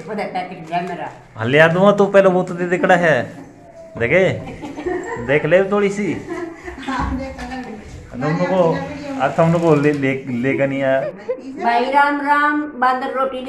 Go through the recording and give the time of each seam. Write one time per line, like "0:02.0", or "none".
0:11.1